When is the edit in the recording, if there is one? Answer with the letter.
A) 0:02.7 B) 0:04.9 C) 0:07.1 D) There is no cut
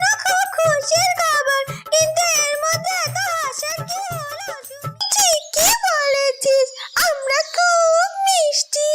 B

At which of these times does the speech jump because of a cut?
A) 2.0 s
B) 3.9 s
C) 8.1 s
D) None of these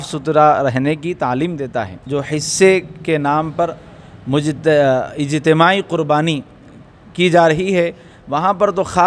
A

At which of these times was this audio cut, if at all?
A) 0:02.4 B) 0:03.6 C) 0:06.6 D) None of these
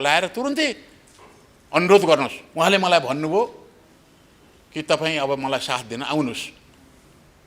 A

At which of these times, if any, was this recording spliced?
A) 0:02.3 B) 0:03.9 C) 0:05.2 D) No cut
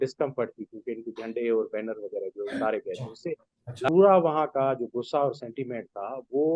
B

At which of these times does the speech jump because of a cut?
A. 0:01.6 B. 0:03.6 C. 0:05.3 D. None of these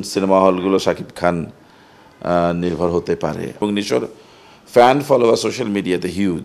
B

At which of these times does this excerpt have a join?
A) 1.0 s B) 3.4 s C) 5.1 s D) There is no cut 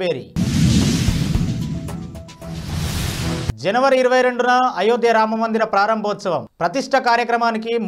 D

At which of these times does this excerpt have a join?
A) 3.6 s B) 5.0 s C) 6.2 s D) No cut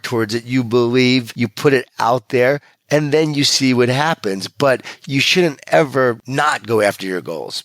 C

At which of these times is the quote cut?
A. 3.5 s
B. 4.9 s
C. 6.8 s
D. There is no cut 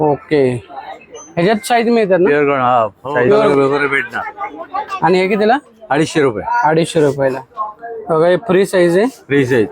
A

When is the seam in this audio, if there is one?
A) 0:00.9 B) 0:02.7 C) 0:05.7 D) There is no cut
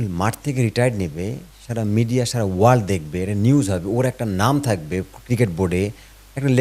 D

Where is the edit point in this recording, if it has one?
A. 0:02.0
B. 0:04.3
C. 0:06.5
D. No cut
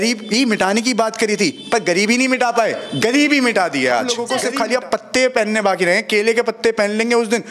B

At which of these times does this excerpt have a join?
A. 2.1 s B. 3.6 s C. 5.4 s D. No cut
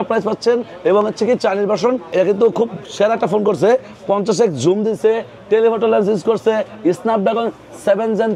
A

